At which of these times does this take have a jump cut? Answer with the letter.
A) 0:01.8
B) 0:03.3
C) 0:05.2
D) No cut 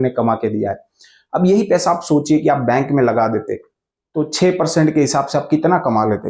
D